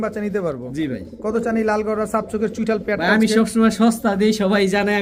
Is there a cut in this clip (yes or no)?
no